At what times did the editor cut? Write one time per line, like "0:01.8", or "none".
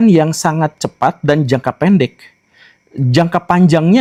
none